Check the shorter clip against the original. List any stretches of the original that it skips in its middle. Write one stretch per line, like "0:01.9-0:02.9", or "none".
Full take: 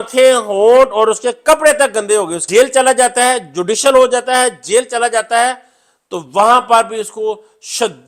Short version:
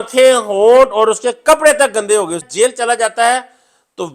0:02.4-0:04.6